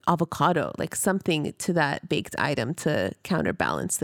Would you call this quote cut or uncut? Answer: uncut